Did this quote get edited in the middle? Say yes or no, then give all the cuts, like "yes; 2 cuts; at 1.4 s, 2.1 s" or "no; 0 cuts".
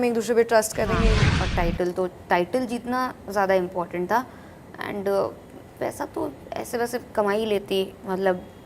yes; 1 cut; at 1.2 s